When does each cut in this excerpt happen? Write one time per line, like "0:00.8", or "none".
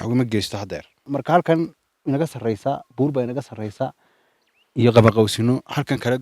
0:01.0